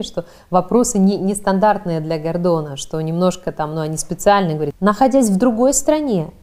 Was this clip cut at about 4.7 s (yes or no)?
yes